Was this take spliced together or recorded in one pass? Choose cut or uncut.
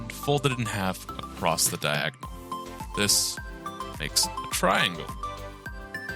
cut